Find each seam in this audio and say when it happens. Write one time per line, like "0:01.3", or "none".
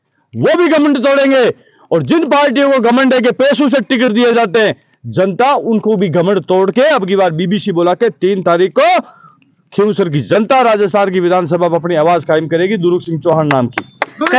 none